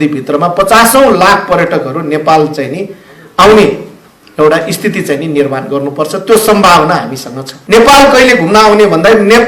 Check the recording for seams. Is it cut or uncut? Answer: cut